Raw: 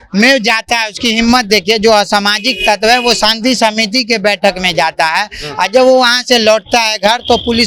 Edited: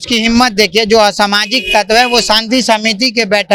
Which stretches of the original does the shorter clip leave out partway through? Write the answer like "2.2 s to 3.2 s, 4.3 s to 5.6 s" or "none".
none